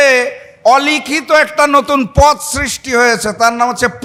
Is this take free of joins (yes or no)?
yes